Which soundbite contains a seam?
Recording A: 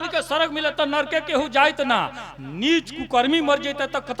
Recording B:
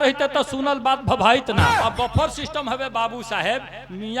B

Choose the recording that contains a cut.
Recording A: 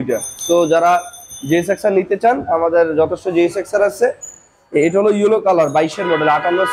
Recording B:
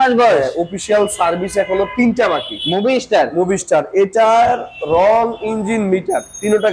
B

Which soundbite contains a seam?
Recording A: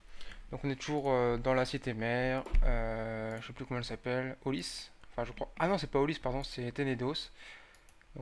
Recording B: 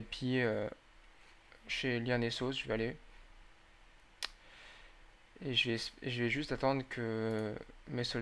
B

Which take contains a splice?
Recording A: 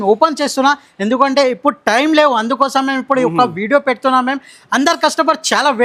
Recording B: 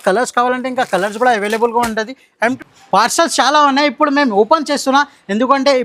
B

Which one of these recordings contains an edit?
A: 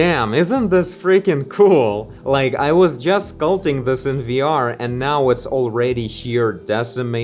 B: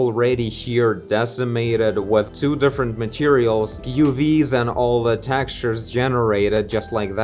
A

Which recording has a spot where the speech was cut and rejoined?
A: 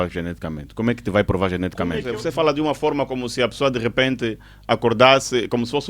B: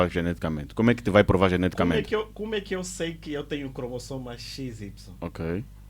A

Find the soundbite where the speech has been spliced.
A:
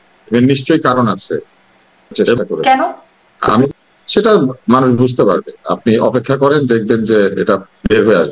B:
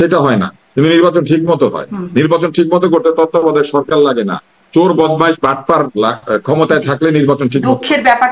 A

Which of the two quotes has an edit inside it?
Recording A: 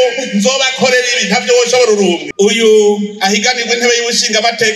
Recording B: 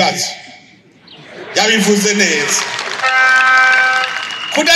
A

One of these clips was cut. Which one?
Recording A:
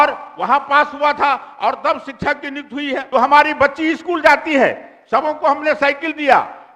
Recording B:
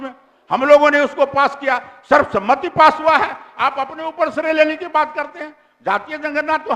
A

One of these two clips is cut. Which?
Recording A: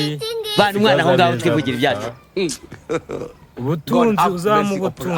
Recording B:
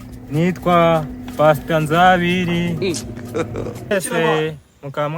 B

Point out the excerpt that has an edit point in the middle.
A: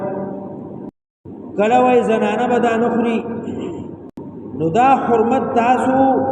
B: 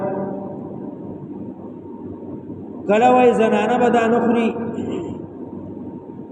A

